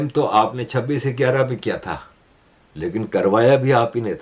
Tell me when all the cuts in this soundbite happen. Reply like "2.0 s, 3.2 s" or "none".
none

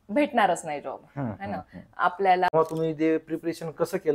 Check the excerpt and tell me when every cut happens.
2.5 s

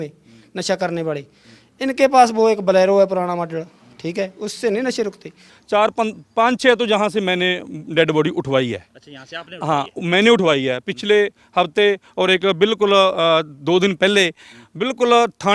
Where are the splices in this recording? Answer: 5.5 s

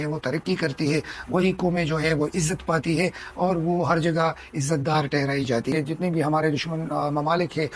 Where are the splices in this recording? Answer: 5.7 s

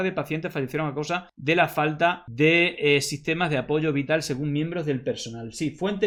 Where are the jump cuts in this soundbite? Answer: none

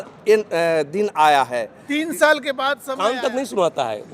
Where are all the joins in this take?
2.9 s

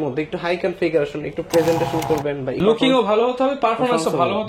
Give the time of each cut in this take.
2.6 s

